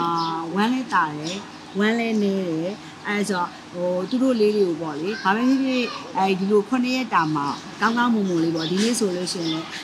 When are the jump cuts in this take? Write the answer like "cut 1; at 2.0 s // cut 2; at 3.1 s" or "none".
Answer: none